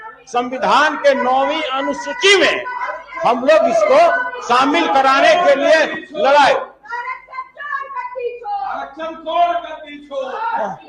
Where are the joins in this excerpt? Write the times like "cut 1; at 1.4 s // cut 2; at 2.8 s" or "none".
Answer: none